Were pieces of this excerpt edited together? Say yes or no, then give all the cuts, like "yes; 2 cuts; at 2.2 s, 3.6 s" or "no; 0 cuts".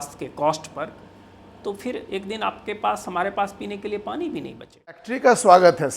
yes; 1 cut; at 5.1 s